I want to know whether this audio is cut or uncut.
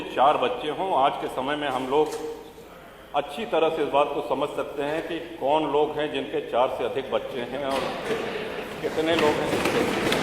uncut